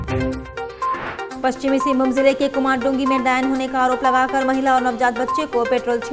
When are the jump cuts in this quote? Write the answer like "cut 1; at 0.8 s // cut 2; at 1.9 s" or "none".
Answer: cut 1; at 1.3 s